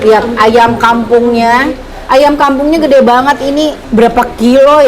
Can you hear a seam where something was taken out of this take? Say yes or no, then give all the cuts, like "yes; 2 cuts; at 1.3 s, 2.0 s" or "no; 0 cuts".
yes; 1 cut; at 3.8 s